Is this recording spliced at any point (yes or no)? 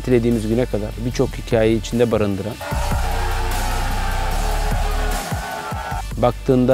no